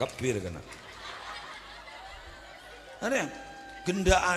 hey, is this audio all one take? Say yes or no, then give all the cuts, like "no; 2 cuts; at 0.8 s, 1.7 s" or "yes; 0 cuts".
no; 1 cut; at 1.7 s